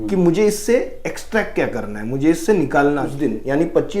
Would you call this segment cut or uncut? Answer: cut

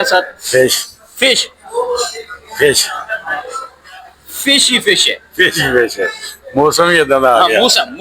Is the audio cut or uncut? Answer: uncut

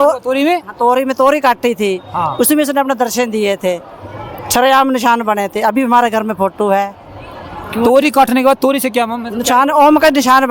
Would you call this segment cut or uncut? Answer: uncut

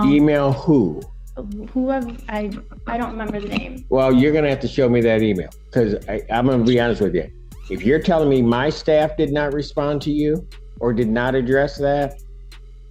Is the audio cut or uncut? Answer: uncut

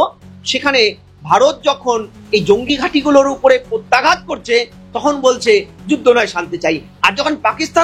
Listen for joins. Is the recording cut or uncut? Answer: uncut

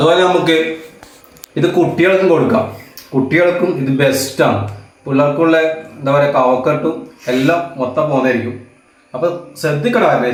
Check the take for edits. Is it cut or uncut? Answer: uncut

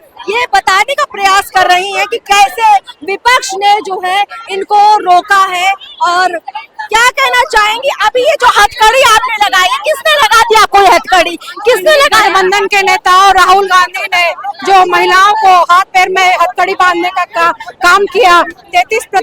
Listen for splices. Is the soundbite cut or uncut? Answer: uncut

